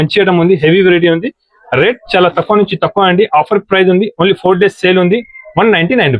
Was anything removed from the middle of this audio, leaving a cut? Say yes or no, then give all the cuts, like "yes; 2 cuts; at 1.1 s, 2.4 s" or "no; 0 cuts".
no; 0 cuts